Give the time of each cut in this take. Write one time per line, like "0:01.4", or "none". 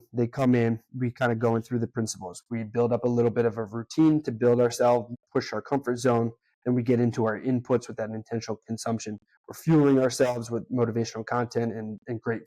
none